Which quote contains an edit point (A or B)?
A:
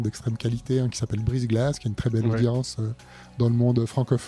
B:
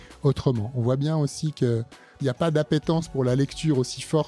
B